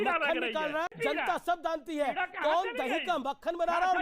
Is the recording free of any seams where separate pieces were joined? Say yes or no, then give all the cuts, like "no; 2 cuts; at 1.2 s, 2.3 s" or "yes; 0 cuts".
no; 1 cut; at 0.9 s